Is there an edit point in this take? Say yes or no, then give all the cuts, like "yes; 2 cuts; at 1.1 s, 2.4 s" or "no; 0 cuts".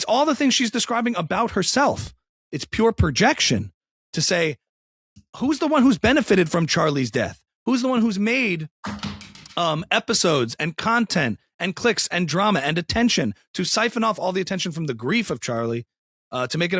no; 0 cuts